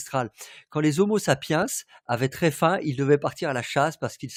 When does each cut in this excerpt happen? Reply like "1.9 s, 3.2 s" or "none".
none

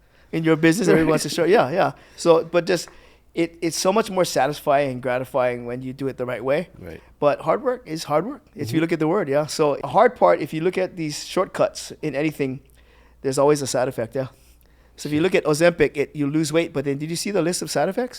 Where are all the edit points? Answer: 9.8 s

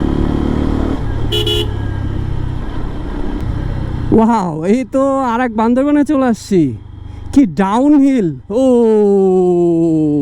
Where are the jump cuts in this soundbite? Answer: 3.4 s

